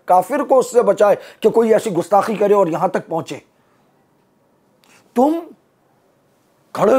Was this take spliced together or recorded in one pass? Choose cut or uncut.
uncut